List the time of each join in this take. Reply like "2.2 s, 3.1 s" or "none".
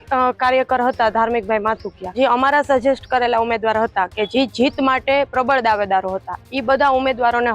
2.1 s